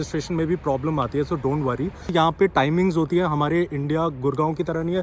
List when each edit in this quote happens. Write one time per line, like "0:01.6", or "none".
0:02.1